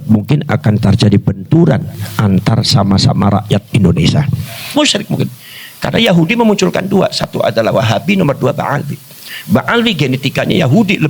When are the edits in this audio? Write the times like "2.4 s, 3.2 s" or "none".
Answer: 4.7 s